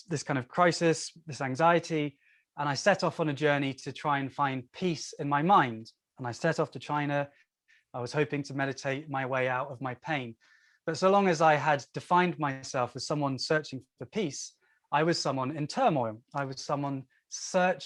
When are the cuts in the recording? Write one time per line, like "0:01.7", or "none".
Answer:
none